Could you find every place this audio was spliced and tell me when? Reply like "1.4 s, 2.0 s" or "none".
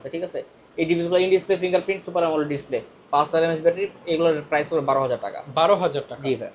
none